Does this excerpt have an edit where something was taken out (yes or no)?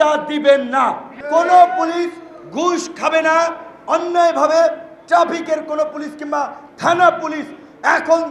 yes